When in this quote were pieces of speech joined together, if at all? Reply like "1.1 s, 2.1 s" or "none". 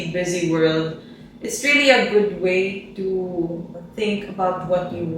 3.8 s